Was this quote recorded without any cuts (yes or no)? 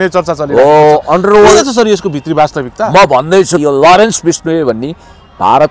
no